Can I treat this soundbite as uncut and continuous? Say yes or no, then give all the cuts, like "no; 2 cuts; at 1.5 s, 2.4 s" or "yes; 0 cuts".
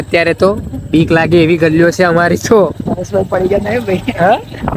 yes; 0 cuts